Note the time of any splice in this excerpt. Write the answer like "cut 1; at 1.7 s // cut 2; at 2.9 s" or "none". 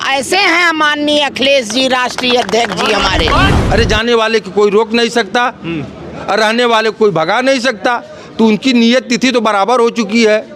cut 1; at 3.6 s